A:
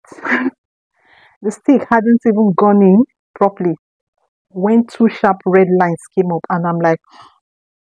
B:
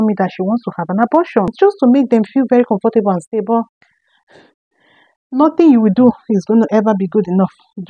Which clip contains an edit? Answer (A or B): B